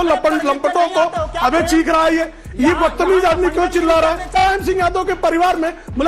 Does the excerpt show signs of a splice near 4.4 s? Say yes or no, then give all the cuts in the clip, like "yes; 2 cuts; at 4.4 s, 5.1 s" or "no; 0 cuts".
yes; 1 cut; at 4.4 s